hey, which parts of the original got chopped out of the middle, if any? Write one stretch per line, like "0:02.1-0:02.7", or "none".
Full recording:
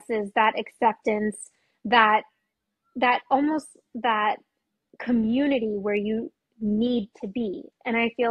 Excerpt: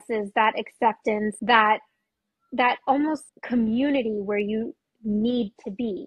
0:01.4-0:01.8
0:03.8-0:04.9